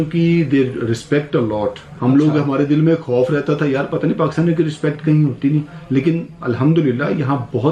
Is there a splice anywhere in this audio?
no; 0 cuts

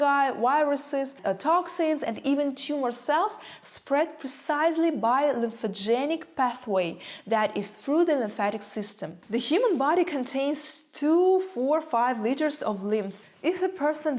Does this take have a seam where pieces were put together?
yes; 3 cuts; at 1.2 s, 9.2 s, 13.2 s

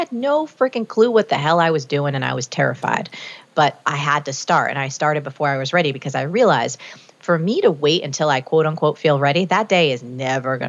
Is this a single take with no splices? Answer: yes; 0 cuts

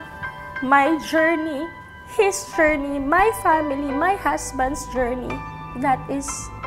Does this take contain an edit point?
no; 0 cuts

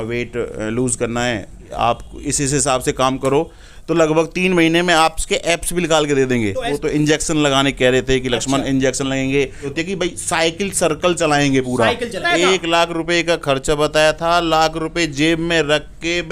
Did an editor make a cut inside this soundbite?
yes; 4 cuts; at 1.7 s, 6.7 s, 9.7 s, 12.2 s

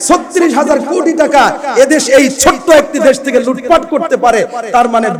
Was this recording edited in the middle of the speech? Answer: no; 0 cuts

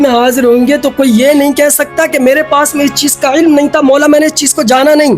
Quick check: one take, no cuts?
yes; 0 cuts

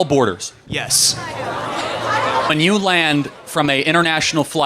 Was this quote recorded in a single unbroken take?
no; 1 cut; at 2.5 s

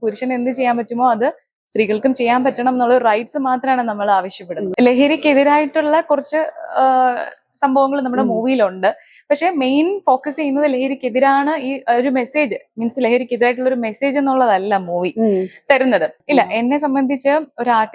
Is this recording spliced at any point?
yes; 2 cuts; at 4.7 s, 16.2 s

